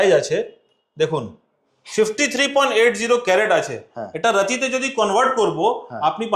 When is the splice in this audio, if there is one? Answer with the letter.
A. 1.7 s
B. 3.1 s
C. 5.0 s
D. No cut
D